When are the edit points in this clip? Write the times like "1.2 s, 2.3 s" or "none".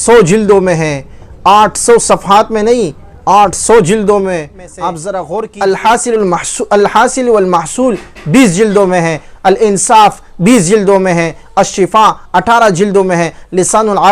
5.4 s